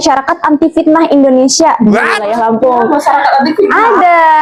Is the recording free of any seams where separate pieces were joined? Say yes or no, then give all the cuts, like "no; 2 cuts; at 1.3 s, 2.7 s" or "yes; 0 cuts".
yes; 0 cuts